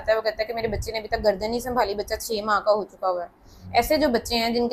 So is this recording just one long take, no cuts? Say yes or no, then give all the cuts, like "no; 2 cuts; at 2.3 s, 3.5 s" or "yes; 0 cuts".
yes; 0 cuts